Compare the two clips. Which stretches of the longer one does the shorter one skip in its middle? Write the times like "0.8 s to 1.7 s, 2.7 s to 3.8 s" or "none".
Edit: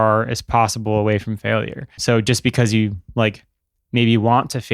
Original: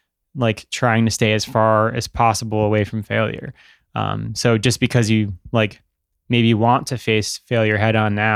3.5 s to 4.2 s

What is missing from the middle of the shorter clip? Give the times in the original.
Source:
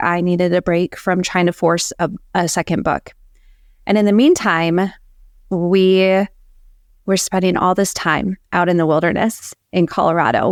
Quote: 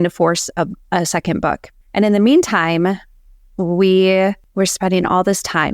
3.2 s to 3.7 s, 6.4 s to 6.9 s

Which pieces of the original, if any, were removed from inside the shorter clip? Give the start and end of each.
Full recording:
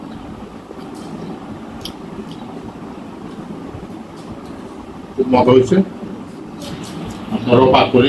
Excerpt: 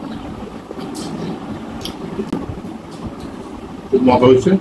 2.3 s to 3.6 s

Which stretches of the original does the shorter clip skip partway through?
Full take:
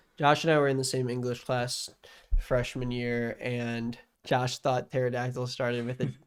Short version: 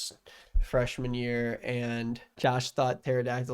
4.0 s to 4.1 s

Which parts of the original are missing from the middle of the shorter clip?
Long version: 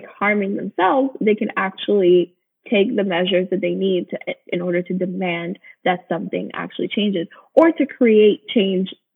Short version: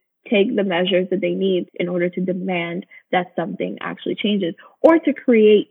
4.1 s to 4.4 s

